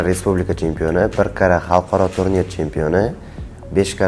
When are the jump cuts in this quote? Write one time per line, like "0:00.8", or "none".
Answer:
none